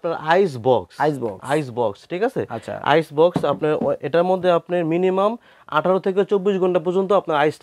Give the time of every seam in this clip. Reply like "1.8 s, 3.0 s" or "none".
none